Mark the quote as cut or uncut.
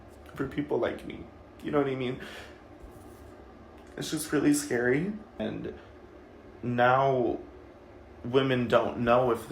cut